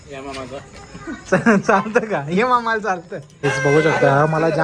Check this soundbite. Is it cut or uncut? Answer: cut